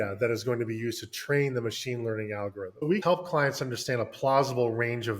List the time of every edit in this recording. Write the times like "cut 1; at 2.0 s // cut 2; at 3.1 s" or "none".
cut 1; at 2.9 s

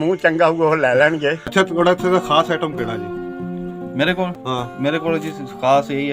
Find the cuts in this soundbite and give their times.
cut 1; at 1.4 s

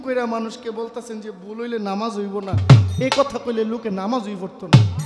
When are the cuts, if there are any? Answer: none

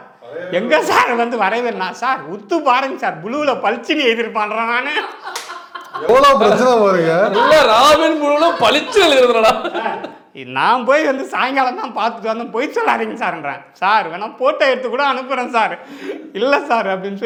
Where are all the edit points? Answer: none

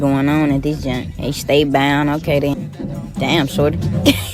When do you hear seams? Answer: cut 1; at 3.1 s

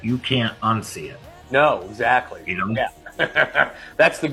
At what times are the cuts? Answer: none

